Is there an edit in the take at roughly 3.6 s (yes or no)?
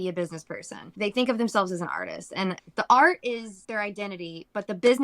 yes